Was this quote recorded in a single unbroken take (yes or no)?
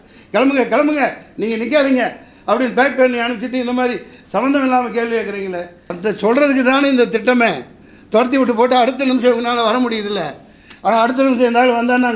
no